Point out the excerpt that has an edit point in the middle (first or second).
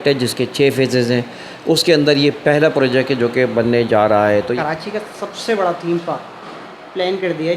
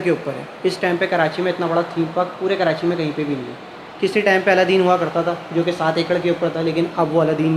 first